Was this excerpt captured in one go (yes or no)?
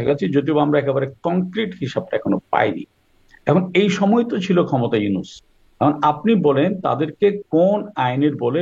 yes